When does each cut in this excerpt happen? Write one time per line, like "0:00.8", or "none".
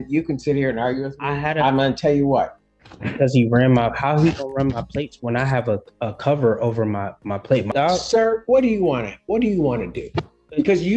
0:02.6
0:07.7